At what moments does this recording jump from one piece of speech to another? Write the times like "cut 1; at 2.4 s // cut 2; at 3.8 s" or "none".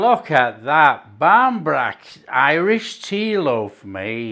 none